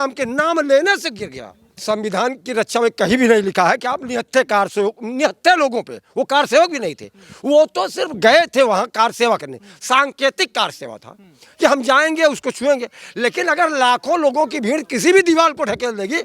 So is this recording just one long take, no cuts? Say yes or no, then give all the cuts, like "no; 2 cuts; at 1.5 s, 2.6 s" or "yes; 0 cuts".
no; 1 cut; at 1.7 s